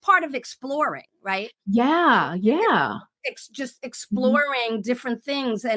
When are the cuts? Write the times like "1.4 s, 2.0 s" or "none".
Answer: none